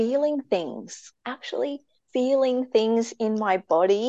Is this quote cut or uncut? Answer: cut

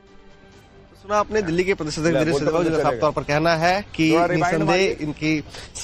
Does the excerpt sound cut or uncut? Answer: cut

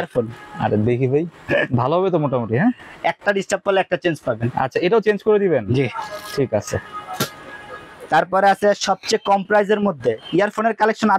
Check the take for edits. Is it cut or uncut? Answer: uncut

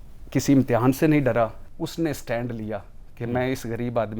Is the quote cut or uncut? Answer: cut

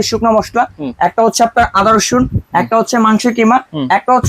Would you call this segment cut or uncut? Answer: uncut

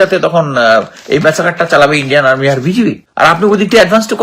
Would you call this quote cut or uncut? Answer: cut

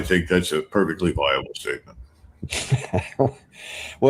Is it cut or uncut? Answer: uncut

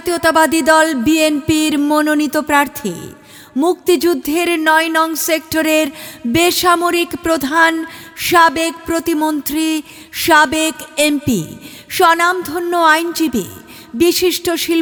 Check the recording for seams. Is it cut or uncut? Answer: uncut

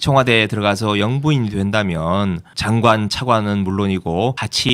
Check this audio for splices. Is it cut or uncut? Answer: uncut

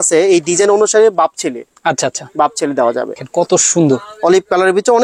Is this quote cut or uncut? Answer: cut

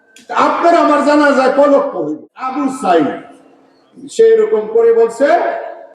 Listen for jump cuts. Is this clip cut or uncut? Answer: cut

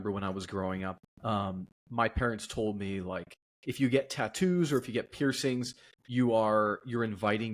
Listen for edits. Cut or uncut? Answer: uncut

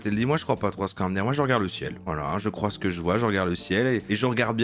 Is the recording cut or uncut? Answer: uncut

